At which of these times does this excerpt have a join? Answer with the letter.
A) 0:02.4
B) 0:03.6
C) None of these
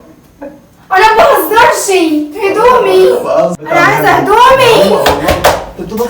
B